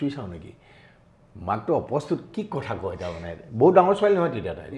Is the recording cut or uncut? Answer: uncut